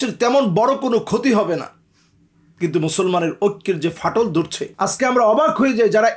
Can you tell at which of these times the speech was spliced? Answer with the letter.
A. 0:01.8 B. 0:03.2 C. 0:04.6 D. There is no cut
C